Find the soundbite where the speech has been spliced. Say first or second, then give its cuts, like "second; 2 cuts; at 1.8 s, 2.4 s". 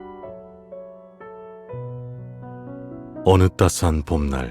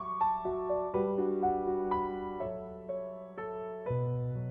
first; 1 cut; at 3.2 s